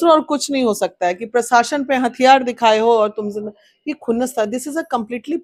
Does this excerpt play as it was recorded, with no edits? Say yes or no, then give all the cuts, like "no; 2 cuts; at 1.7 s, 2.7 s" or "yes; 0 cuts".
yes; 0 cuts